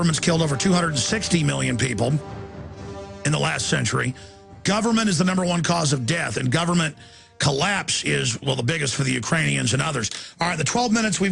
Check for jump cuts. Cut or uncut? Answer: uncut